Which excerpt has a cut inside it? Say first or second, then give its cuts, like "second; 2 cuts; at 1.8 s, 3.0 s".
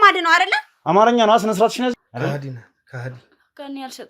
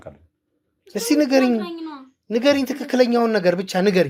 first; 1 cut; at 2.1 s